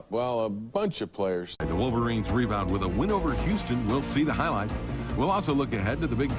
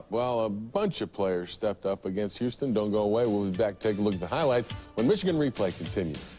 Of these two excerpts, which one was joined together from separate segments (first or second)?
second